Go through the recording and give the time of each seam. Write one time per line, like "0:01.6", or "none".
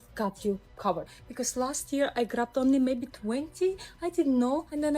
0:01.1